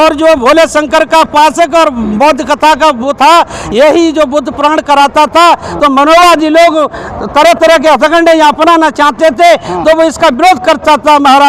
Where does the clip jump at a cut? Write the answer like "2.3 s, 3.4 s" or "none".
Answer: none